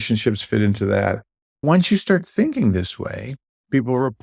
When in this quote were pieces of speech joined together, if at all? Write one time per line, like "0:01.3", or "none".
0:01.6